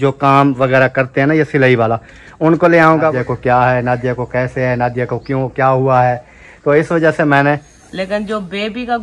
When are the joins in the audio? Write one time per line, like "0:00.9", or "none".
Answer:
0:03.1
0:07.7

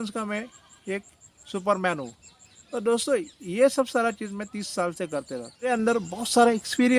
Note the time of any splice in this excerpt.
0:05.7

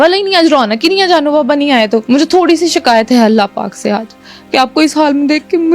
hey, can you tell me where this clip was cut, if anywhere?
0:02.0

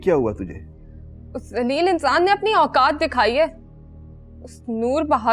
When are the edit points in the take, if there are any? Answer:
none

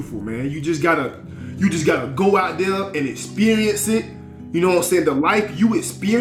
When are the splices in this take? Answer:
none

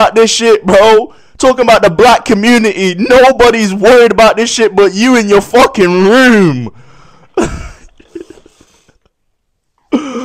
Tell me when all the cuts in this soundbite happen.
none

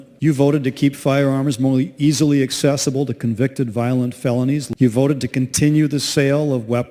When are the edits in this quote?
none

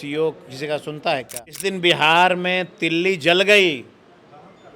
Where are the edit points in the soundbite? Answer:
0:01.6

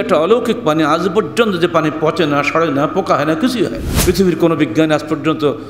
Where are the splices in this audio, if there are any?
0:03.9

